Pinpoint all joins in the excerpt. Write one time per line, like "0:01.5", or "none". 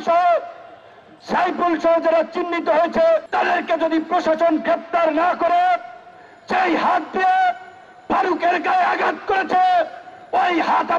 0:03.3